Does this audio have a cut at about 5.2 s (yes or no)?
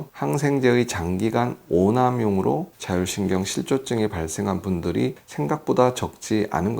yes